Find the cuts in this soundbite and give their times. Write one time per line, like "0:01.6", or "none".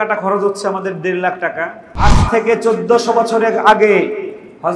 0:02.2